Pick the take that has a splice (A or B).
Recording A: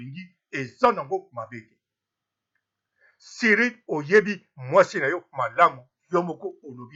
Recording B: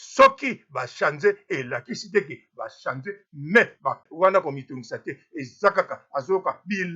B